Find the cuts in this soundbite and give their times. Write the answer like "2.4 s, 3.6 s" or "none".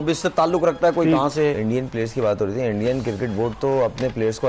1.6 s